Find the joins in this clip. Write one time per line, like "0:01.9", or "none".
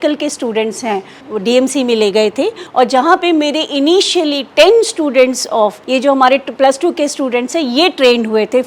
0:01.2
0:02.6
0:05.8